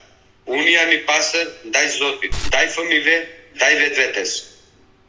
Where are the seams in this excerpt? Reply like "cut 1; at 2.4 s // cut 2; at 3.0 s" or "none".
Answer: cut 1; at 2.3 s